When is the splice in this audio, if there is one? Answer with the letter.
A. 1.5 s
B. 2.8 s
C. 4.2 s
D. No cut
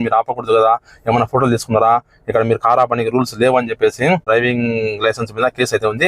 C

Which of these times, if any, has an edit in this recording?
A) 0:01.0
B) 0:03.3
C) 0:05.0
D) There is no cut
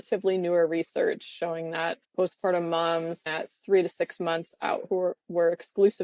B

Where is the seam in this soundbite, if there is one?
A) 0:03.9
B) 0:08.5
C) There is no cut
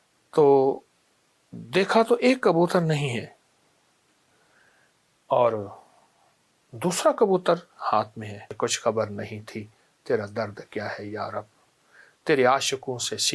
B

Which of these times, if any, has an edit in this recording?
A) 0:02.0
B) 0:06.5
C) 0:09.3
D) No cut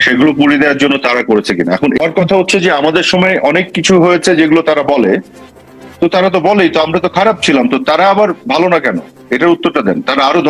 A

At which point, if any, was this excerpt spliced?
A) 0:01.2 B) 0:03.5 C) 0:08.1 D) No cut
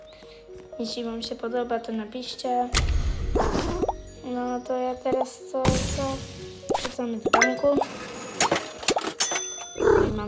D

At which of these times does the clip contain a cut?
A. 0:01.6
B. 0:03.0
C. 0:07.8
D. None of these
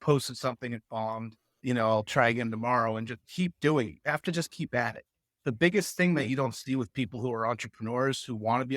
A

